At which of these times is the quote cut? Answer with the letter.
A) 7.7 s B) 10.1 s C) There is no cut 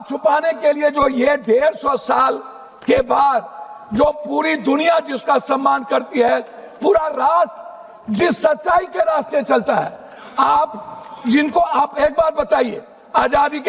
C